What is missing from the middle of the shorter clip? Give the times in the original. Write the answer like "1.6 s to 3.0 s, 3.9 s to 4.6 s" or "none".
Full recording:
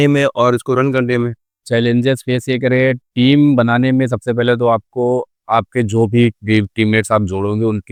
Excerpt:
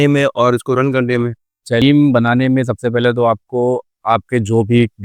1.8 s to 3.3 s